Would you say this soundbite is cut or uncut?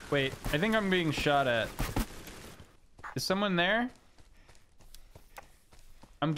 cut